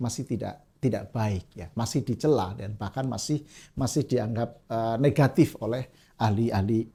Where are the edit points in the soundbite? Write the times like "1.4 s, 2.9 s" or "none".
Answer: none